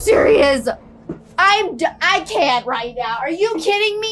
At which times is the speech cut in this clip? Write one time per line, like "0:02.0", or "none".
none